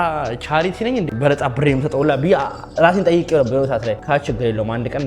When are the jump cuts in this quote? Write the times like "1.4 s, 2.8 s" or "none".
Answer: 1.1 s, 4.0 s

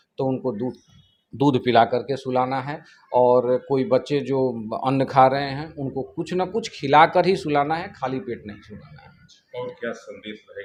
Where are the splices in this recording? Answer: none

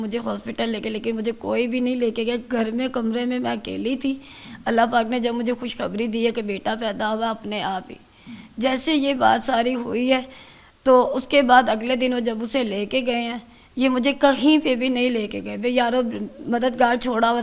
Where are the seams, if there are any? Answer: none

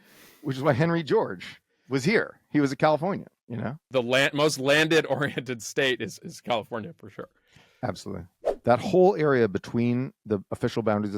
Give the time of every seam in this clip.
3.8 s, 8.4 s

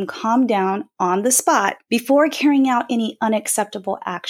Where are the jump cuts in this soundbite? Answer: 1.8 s

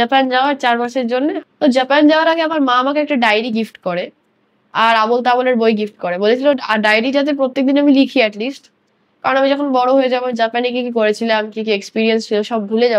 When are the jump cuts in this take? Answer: 1.4 s

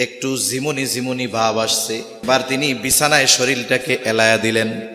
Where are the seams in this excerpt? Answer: 2.2 s

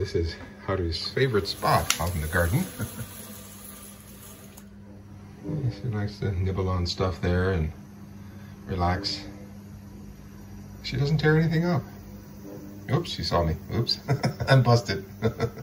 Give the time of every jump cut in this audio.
3.0 s, 5.0 s

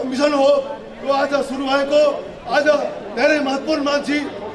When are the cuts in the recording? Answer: none

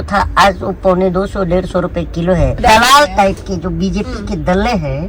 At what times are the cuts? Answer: 2.6 s

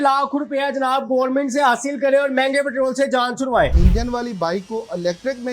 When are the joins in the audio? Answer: 3.8 s

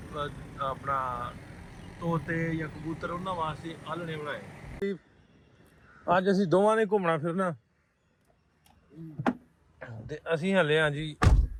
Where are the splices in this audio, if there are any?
none

